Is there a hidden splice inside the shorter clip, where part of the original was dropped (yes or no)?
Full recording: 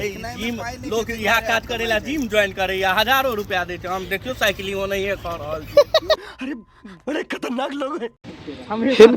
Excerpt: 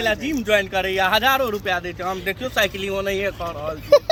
no